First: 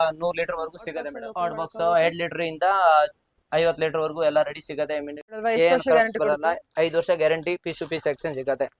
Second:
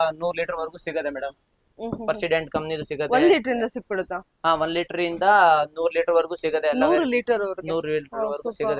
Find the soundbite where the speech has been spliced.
first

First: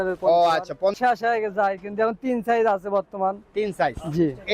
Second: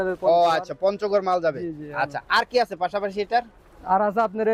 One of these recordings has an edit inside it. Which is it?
first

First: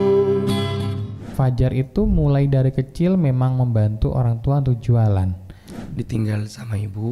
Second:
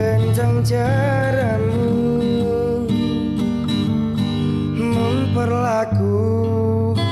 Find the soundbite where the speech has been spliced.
first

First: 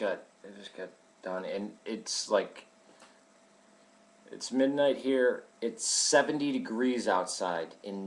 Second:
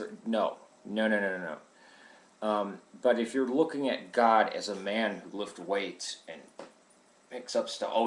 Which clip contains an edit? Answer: second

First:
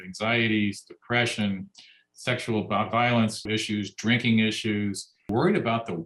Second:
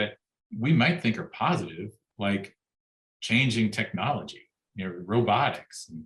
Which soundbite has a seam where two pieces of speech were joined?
first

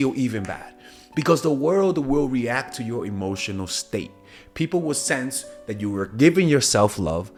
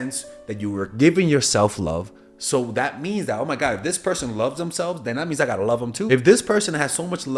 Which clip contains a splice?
second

